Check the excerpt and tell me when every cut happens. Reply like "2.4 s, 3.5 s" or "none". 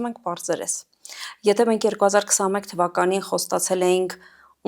none